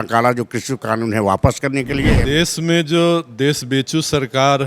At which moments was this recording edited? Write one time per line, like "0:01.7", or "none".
0:02.2

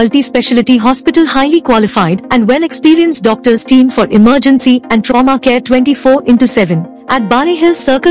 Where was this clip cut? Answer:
none

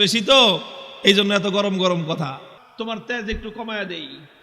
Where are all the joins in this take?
0:02.6

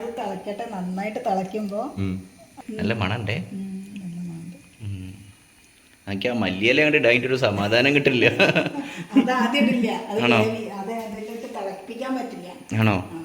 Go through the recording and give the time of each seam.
0:02.5

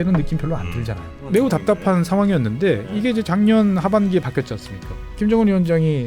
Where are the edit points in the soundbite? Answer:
0:01.1
0:05.0

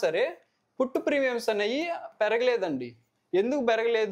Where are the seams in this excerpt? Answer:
none

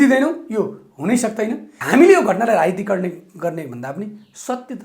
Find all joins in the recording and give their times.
0:01.7

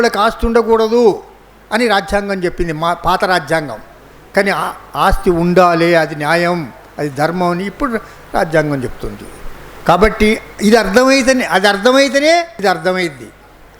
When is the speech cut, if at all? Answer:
0:12.5

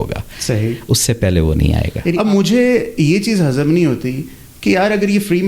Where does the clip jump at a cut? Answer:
0:02.2

